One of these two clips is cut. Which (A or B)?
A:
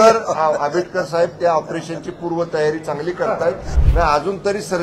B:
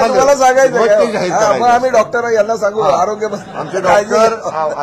A